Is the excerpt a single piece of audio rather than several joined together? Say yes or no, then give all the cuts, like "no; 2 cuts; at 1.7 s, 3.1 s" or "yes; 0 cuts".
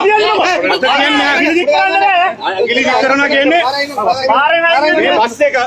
yes; 0 cuts